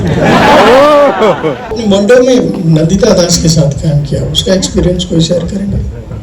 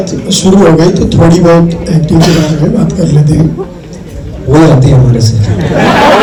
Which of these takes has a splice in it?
first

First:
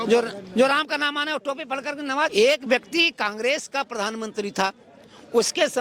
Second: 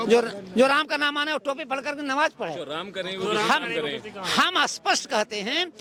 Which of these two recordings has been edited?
first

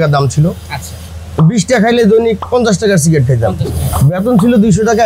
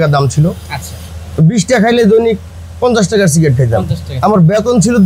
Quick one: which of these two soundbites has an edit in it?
first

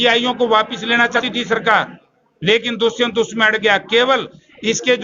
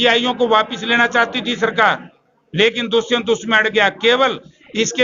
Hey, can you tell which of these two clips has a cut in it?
first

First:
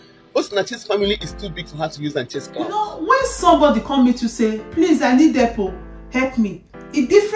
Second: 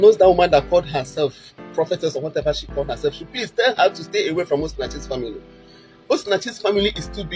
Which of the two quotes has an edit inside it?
first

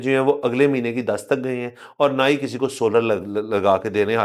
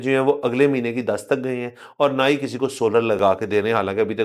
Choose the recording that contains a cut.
second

